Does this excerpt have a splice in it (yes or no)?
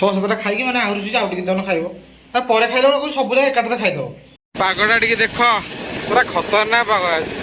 yes